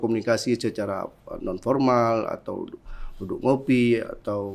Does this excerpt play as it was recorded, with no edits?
yes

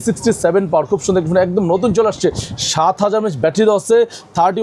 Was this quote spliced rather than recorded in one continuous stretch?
no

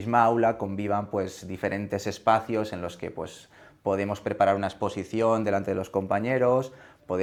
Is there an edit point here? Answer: no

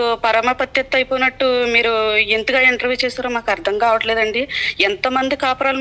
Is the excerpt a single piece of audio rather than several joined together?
yes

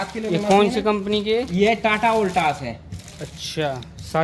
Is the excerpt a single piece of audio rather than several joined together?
yes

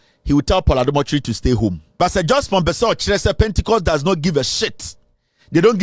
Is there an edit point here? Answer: yes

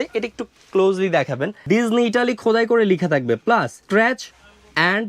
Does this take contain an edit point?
yes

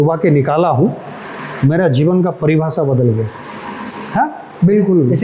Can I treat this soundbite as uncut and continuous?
yes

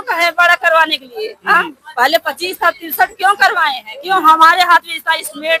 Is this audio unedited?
yes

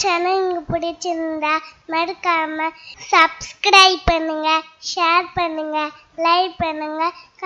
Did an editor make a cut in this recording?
no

